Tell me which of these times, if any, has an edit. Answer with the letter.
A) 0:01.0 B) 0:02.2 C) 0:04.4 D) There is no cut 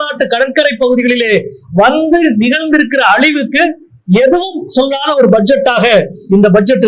D